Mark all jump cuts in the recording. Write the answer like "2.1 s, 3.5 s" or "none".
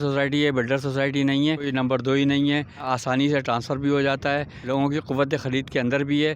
1.7 s, 2.9 s, 4.6 s